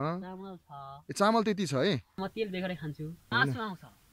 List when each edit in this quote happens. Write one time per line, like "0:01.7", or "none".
0:02.2
0:03.3